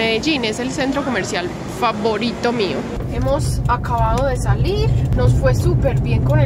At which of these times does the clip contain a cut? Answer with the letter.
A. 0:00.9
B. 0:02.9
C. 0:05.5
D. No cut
B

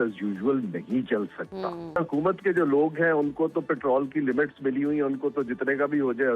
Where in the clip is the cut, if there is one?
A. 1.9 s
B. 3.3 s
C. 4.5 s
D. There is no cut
A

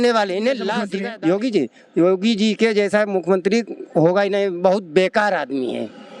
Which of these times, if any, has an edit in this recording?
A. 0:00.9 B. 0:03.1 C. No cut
A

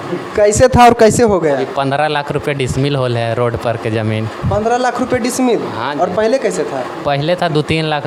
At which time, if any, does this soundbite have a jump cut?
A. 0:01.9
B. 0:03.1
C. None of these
C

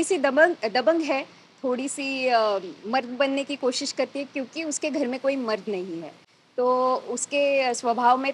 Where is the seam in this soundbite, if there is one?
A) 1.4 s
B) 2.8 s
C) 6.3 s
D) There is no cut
D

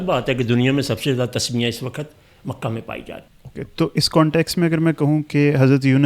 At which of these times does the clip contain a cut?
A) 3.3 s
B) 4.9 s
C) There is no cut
A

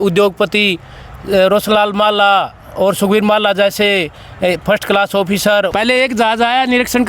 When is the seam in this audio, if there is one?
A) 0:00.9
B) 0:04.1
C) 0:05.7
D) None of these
C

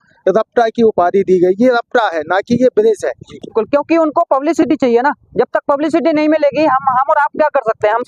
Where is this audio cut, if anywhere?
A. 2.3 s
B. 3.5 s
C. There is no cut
B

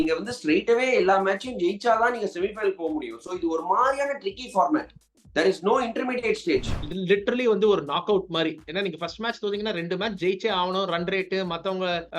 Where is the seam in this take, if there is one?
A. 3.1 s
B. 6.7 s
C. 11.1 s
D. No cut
B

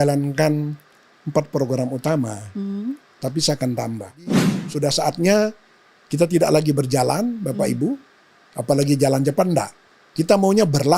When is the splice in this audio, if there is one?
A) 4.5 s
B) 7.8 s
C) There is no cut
A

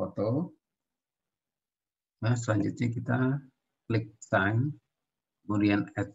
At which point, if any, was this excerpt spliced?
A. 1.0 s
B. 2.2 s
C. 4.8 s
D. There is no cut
D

